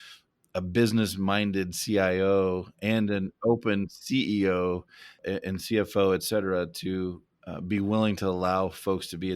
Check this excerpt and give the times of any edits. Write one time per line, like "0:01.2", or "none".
0:05.1
0:07.3